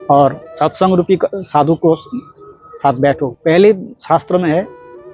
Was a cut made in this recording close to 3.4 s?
yes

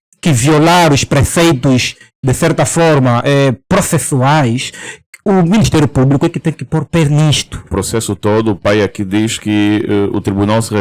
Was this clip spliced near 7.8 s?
yes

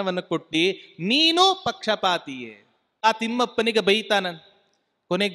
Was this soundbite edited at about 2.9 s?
yes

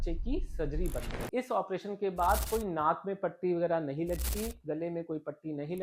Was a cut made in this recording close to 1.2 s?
yes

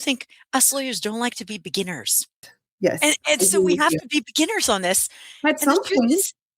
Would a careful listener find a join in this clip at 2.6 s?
yes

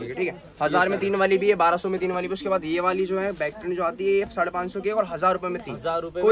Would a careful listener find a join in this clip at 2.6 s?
no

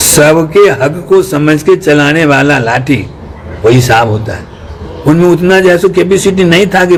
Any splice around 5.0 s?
no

